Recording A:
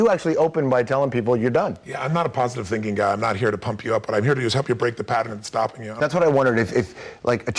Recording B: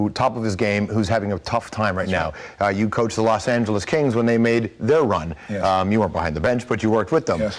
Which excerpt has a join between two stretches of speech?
A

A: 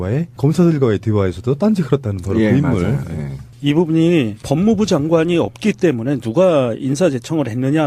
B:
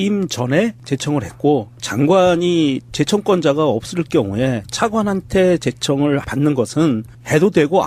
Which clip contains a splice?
A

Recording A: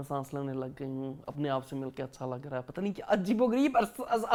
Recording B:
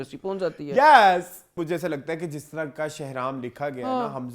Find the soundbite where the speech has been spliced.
B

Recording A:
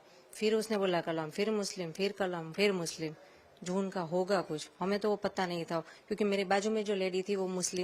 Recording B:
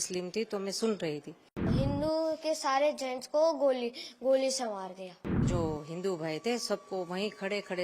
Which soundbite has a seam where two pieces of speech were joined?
B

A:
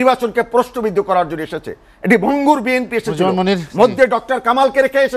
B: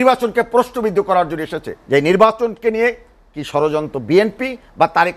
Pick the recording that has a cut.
B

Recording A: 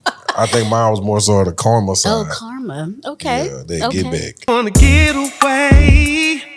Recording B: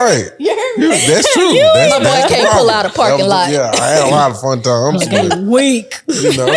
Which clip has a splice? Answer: A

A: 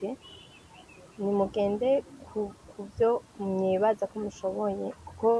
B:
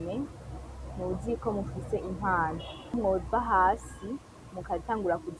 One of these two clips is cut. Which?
B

